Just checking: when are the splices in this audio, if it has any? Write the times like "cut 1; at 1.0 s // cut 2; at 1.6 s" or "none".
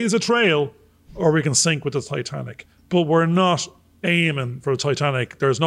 none